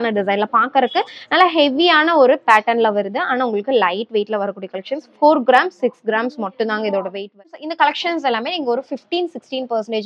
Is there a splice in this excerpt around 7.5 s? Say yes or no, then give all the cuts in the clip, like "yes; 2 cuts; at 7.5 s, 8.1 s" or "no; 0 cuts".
yes; 1 cut; at 7.5 s